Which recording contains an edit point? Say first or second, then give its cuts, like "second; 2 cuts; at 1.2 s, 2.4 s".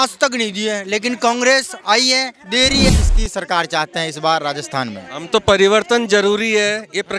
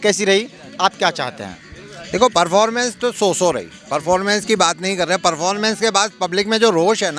first; 1 cut; at 2.9 s